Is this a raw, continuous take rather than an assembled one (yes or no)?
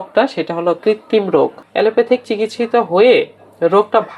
no